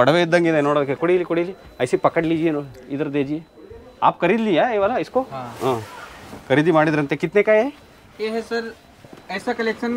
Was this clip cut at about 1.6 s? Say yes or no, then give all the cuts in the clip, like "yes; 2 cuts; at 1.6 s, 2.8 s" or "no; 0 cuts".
no; 0 cuts